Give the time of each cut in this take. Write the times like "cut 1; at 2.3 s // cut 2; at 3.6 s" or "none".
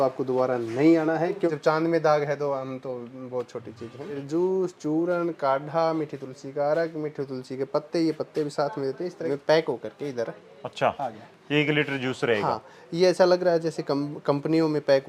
cut 1; at 1.5 s // cut 2; at 4.2 s // cut 3; at 9.3 s